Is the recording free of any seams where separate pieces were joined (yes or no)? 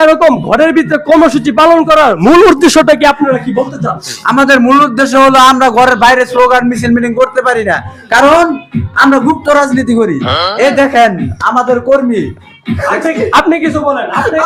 yes